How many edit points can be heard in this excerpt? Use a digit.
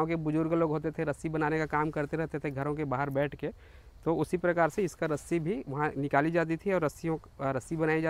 0